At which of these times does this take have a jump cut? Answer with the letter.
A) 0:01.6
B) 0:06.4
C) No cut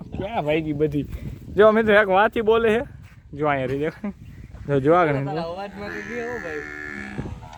C